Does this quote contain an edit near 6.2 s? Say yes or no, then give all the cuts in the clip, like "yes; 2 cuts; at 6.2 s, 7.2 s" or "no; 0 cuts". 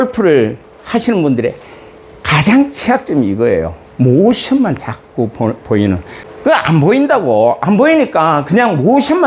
yes; 1 cut; at 6.2 s